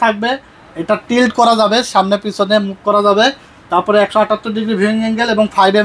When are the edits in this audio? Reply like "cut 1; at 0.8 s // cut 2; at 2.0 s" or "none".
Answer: none